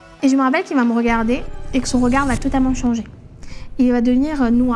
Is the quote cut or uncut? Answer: uncut